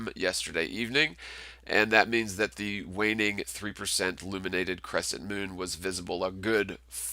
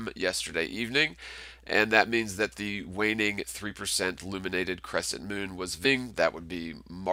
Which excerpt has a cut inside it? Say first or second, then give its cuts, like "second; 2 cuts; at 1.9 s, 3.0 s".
first; 1 cut; at 5.7 s